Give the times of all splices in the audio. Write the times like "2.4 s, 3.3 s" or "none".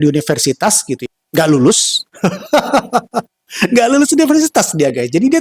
1.1 s